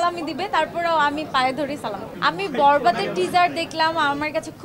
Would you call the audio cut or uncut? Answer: cut